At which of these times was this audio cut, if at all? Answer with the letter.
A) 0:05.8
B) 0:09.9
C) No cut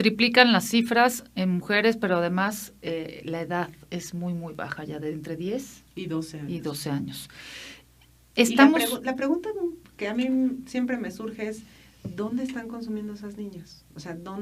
A